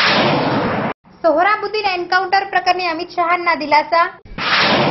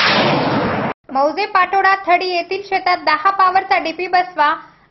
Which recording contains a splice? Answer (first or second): first